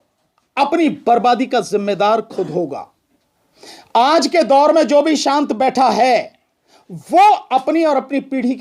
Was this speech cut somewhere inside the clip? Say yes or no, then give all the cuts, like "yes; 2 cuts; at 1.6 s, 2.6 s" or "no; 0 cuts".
no; 0 cuts